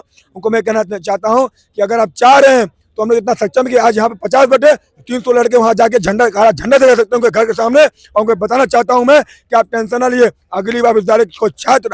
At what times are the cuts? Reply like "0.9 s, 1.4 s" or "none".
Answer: none